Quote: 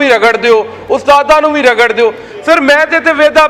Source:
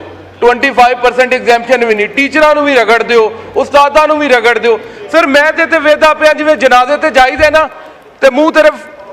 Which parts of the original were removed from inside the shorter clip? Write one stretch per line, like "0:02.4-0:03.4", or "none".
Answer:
none

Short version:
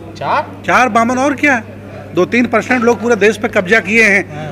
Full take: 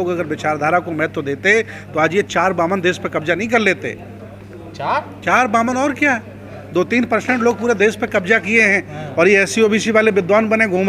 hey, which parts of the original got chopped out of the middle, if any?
none

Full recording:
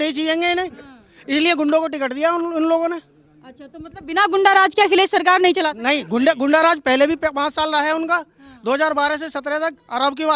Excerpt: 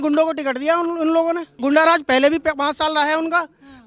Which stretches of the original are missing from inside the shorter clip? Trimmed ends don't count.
0:03.2-0:06.4

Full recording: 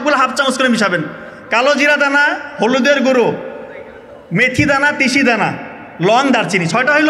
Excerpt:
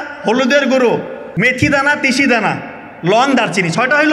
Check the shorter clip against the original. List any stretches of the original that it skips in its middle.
0:03.5-0:04.1

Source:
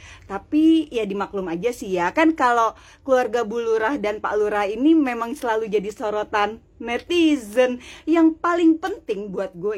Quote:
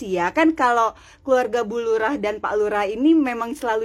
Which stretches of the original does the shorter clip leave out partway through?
none

